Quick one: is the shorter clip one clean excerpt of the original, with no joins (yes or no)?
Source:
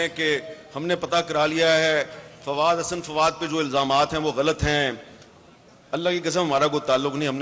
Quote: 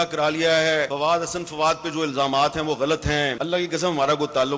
no